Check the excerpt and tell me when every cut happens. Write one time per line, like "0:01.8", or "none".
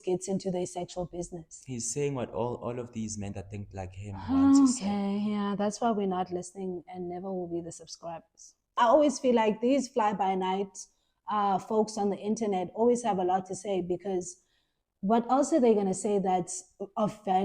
0:08.8

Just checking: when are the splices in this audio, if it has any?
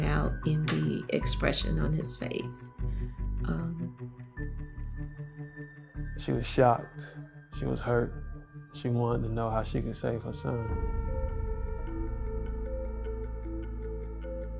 none

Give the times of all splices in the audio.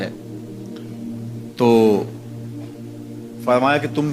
0:02.1
0:03.5

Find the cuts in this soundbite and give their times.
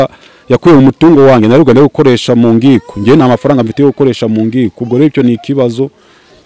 none

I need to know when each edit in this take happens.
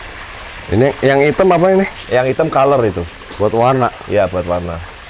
none

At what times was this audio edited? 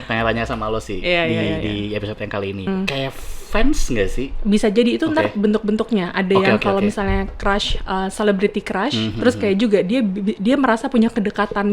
0:02.7

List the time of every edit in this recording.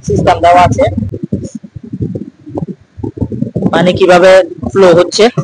0:01.1

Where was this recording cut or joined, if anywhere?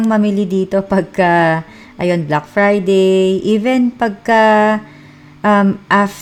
none

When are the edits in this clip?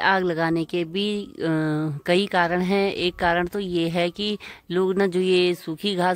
none

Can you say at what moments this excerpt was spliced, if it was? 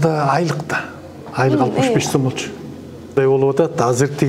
0:03.1

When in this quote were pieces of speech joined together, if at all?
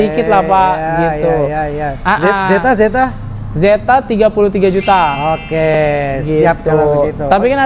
none

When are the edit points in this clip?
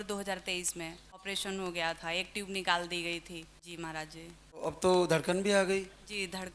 0:01.2
0:03.6
0:04.6

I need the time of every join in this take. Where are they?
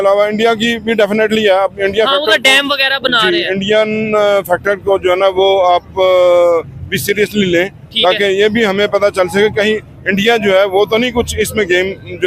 none

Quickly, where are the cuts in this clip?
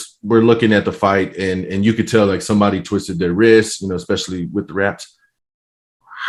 none

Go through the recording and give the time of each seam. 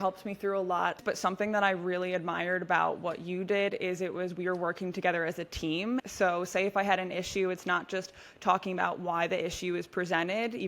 0:01.0
0:06.1

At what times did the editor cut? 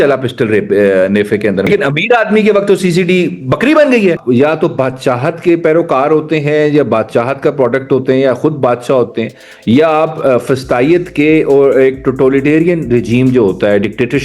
0:01.7
0:04.2

